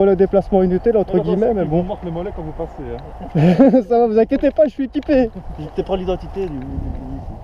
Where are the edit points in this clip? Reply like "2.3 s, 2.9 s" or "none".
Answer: none